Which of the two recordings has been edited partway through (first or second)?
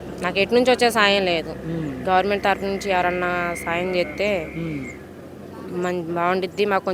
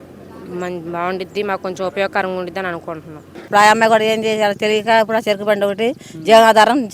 second